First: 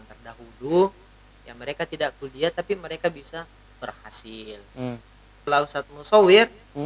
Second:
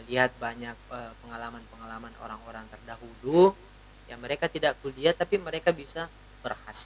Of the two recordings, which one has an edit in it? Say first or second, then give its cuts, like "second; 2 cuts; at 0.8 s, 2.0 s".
first; 1 cut; at 5.5 s